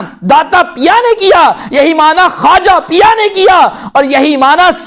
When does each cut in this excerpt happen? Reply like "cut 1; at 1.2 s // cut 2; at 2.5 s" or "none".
none